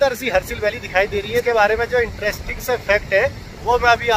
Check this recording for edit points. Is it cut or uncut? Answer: cut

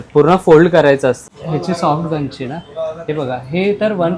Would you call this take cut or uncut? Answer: cut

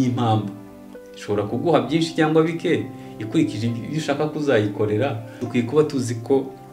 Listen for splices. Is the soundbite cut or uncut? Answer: cut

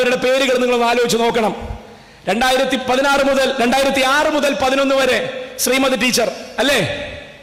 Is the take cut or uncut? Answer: uncut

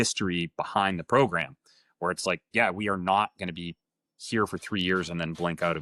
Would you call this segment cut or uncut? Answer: uncut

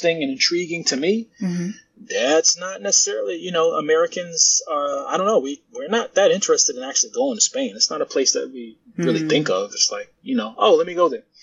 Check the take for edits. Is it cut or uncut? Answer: uncut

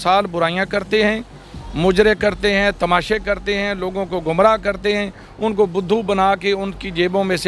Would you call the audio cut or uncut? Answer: uncut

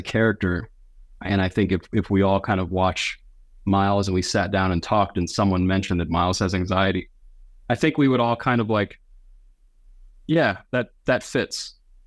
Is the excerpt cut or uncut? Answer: uncut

